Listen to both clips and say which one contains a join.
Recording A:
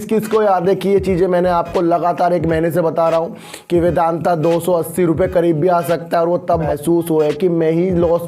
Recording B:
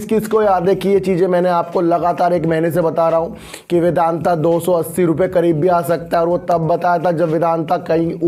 A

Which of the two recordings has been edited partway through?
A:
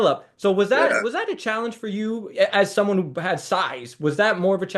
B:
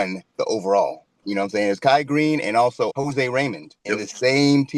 B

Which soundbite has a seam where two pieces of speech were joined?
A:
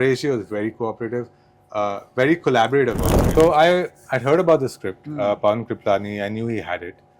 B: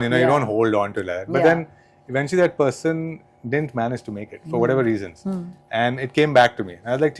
A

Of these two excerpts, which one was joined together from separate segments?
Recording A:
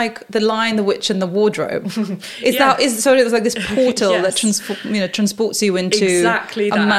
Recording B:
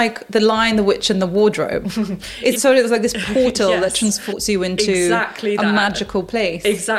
B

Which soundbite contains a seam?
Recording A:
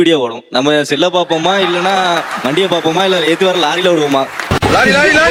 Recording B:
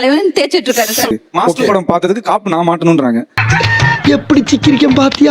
B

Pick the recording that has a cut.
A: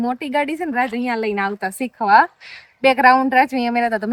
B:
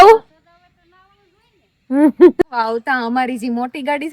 B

